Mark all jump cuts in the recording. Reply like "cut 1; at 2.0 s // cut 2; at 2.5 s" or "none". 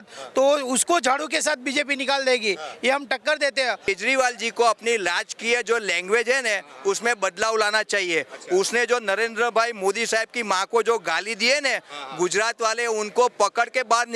cut 1; at 3.9 s